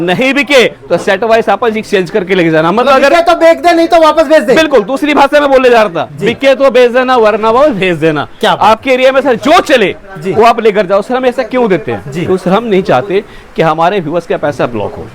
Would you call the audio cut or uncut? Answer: uncut